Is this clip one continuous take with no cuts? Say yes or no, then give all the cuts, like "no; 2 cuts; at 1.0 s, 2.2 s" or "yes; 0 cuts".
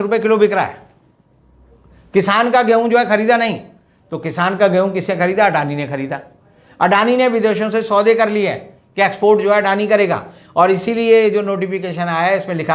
yes; 0 cuts